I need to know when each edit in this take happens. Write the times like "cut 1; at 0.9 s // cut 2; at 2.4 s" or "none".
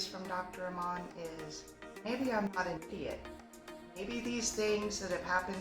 cut 1; at 2.1 s // cut 2; at 3.3 s

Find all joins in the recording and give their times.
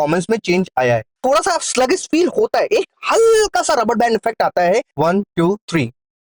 cut 1; at 1.1 s // cut 2; at 4.9 s

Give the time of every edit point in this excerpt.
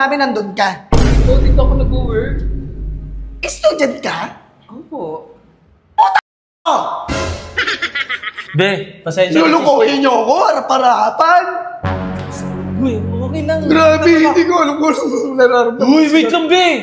none

